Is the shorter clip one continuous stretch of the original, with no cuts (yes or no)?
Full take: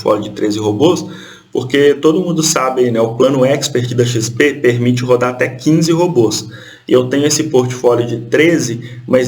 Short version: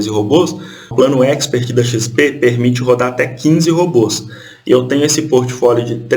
no